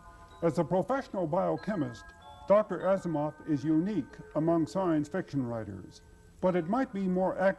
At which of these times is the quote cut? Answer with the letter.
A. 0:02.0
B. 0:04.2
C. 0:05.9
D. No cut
B